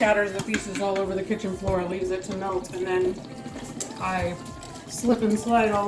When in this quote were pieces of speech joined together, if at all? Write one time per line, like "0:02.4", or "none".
none